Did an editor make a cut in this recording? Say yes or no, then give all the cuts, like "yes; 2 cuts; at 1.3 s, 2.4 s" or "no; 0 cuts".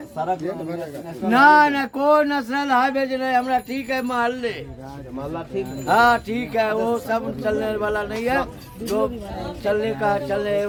no; 0 cuts